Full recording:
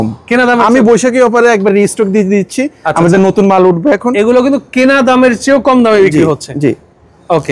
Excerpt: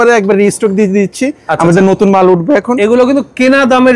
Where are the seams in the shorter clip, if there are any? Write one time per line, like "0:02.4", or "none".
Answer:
none